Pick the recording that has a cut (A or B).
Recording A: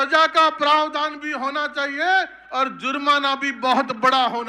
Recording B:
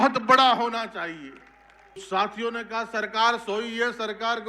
B